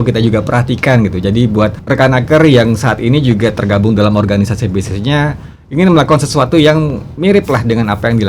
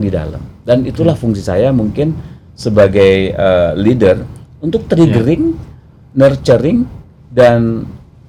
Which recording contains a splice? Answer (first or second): first